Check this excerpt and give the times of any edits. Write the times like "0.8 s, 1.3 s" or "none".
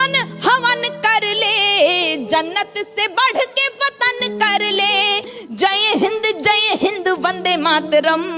5.2 s